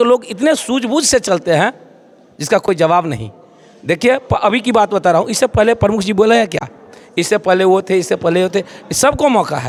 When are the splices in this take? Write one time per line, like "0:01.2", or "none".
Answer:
none